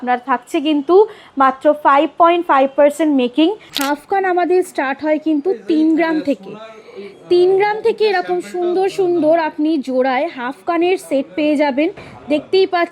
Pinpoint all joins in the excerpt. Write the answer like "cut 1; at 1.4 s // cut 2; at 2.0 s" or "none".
cut 1; at 3.7 s